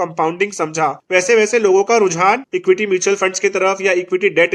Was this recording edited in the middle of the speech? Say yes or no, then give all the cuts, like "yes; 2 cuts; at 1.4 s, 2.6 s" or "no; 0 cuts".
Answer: yes; 2 cuts; at 1.0 s, 2.5 s